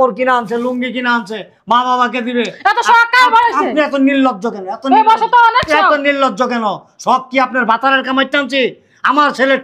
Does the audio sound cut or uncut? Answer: uncut